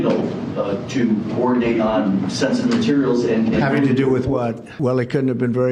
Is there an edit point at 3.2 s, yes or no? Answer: no